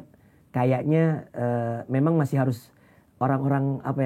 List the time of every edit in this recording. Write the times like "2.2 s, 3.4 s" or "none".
none